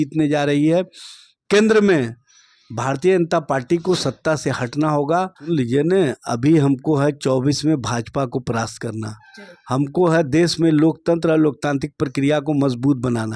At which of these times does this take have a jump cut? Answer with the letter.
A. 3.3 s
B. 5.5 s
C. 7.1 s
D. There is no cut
B